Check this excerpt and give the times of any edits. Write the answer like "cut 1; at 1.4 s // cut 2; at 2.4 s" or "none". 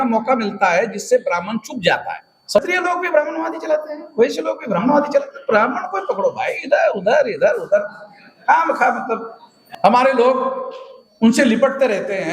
cut 1; at 2.6 s // cut 2; at 9.6 s